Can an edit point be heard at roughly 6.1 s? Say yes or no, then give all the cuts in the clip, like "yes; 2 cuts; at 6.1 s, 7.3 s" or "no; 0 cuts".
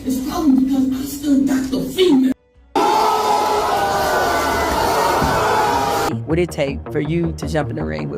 yes; 1 cut; at 6.1 s